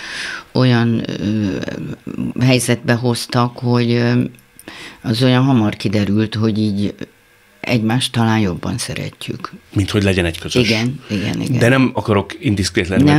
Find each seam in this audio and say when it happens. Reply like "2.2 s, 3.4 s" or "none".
none